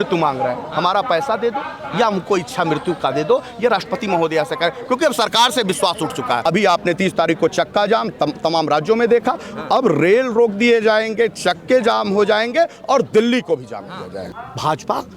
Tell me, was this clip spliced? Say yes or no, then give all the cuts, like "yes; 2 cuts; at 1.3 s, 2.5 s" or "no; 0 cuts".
yes; 2 cuts; at 6.4 s, 14.2 s